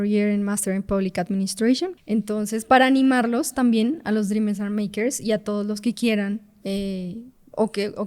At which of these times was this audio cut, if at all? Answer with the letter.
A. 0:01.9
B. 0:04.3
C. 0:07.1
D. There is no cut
A